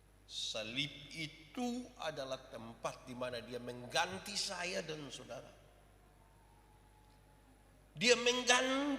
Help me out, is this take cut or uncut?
uncut